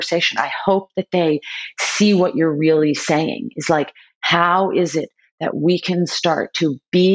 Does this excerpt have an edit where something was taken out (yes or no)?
no